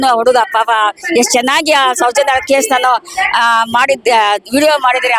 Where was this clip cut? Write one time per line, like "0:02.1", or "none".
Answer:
none